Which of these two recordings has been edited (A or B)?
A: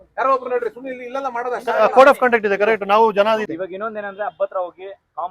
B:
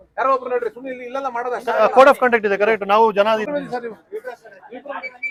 A